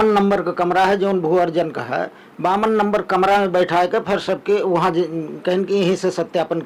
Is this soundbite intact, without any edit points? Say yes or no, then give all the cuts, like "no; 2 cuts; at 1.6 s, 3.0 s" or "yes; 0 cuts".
yes; 0 cuts